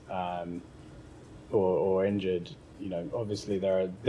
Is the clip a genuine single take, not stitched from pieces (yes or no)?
yes